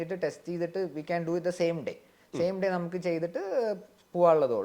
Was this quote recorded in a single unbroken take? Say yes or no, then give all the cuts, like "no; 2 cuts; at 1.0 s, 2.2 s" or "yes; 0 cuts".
yes; 0 cuts